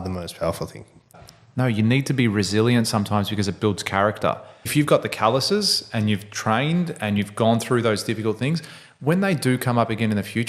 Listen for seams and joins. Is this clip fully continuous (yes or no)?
no